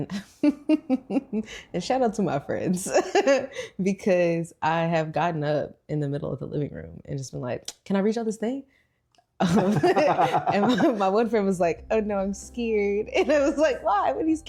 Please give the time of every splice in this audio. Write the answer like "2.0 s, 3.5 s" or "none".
none